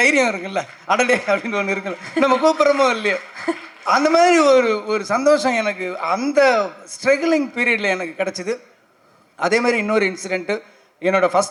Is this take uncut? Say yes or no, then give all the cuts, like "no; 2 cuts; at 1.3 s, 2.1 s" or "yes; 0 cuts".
yes; 0 cuts